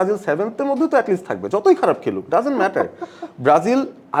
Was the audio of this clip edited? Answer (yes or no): no